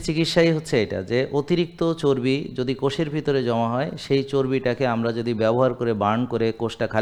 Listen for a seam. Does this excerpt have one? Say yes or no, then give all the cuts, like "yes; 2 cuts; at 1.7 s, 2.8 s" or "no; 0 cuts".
no; 0 cuts